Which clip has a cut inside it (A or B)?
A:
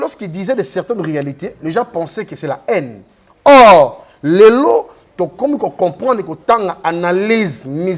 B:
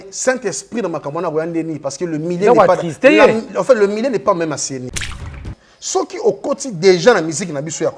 B